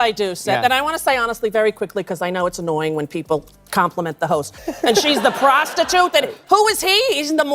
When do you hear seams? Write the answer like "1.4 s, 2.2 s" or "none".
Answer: 4.6 s